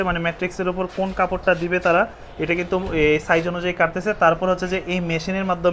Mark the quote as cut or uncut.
uncut